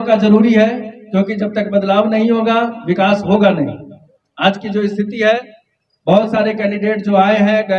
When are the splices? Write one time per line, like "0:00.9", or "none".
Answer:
none